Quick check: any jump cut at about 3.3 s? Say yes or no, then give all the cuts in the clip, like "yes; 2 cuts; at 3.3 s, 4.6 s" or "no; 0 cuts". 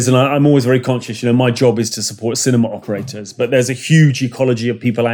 no; 0 cuts